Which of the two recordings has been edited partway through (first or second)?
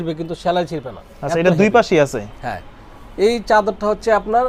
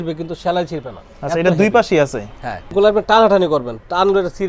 second